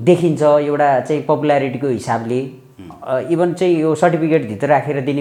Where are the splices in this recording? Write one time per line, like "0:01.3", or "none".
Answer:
none